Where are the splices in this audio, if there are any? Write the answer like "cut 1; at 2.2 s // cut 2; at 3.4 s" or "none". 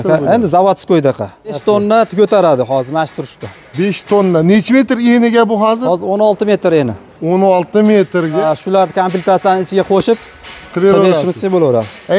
cut 1; at 1.6 s // cut 2; at 8.4 s